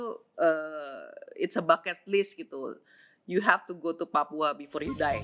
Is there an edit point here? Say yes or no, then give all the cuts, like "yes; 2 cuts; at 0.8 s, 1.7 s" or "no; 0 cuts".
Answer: no; 0 cuts